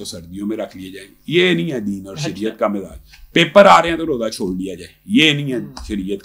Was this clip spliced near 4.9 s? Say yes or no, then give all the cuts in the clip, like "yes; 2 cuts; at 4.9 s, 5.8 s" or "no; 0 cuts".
no; 0 cuts